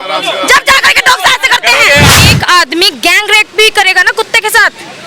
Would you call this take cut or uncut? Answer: cut